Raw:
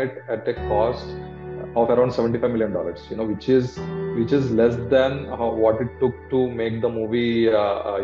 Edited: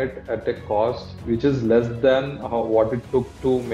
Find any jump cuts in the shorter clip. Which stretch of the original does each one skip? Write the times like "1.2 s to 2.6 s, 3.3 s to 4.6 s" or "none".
1.1 s to 4.0 s